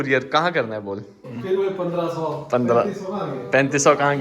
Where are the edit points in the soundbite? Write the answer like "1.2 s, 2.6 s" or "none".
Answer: 1.2 s